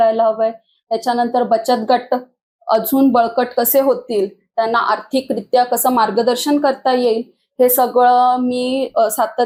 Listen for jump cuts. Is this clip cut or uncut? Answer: uncut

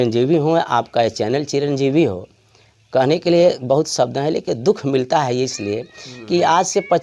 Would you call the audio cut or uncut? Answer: uncut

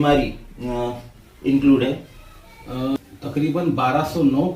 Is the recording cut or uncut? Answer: cut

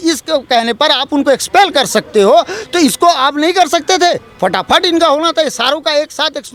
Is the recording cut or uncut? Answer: uncut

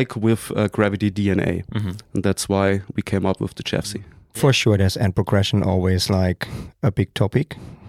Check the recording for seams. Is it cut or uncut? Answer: cut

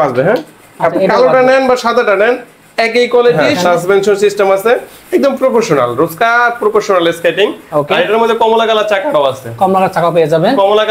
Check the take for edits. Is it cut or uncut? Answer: cut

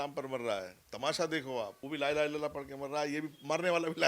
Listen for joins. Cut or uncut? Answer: cut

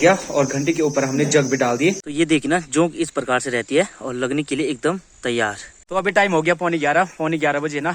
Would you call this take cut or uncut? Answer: cut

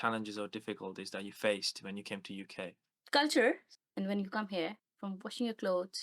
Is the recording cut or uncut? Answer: cut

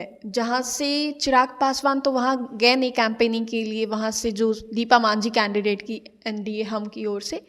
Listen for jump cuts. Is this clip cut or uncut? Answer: uncut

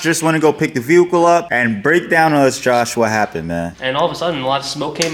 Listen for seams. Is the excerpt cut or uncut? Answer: cut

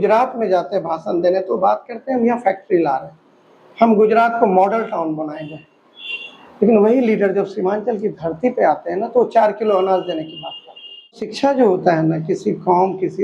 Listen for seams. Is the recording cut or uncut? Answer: cut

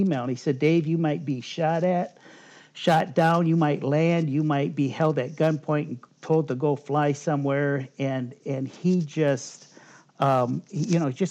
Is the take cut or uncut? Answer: uncut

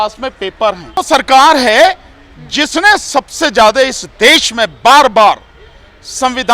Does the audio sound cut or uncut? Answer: cut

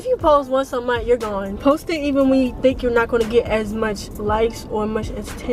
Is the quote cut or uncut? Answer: uncut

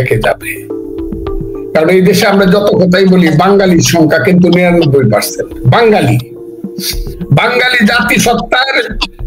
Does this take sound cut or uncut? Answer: uncut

